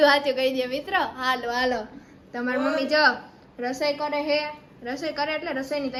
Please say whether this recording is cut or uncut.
uncut